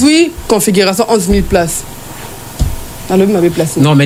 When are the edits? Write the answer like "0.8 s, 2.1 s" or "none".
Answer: none